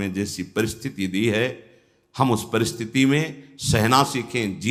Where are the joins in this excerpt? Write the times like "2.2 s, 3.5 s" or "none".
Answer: none